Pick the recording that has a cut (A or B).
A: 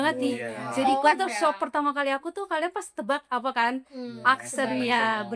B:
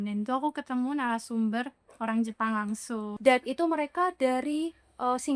B